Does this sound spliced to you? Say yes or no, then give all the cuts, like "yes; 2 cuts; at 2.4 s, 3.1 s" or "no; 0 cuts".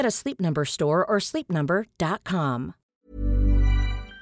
yes; 1 cut; at 2.9 s